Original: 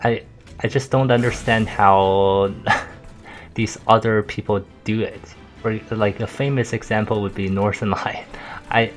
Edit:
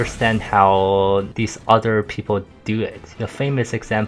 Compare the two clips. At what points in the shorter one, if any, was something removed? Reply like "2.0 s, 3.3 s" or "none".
1.3 s, 3.2 s